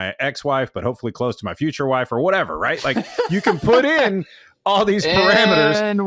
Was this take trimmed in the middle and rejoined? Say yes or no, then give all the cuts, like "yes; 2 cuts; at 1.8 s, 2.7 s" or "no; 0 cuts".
no; 0 cuts